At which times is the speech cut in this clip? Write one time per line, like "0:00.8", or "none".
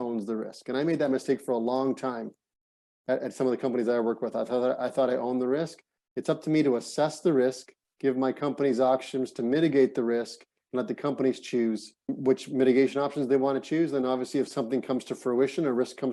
none